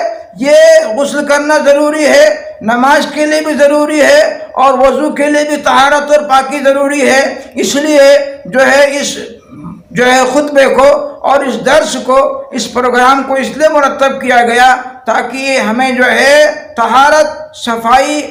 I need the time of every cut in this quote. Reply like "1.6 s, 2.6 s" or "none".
none